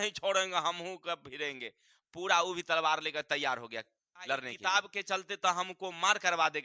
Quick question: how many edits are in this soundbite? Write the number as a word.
one